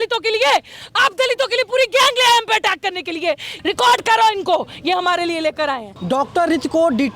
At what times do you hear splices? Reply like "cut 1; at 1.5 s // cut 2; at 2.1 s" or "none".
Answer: cut 1; at 3.5 s // cut 2; at 5.9 s